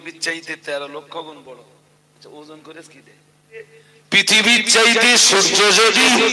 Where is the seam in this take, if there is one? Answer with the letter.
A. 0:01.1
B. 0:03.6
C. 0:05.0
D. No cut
B